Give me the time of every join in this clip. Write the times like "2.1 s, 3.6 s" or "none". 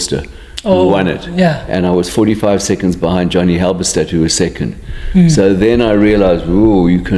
none

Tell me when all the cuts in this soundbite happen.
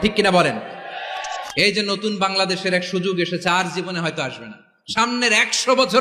1.4 s

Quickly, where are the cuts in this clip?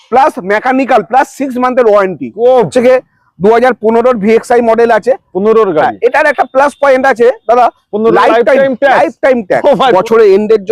2.7 s, 9.9 s

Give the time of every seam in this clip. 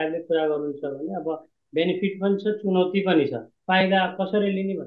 3.5 s

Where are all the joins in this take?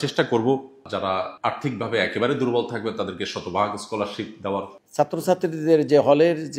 1.0 s, 4.8 s

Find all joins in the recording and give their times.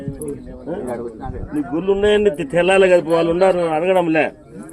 1.4 s

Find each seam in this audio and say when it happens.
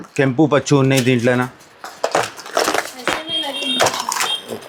none

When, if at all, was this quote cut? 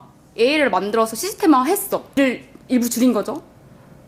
2.2 s

